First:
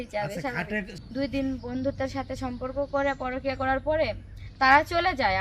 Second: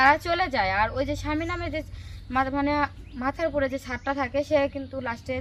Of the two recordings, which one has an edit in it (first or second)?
first